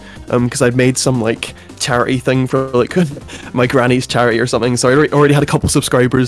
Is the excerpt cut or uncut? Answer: uncut